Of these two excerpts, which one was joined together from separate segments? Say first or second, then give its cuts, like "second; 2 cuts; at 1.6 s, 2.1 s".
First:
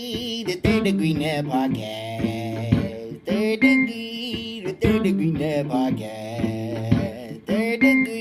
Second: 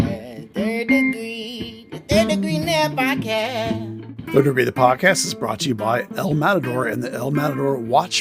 second; 1 cut; at 4.0 s